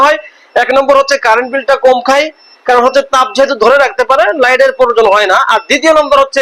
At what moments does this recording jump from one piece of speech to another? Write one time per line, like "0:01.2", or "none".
none

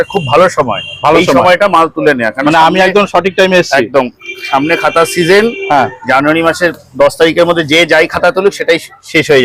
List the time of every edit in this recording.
none

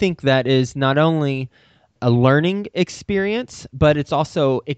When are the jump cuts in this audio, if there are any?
0:01.9

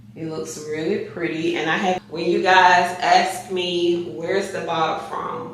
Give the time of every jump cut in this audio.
0:02.0

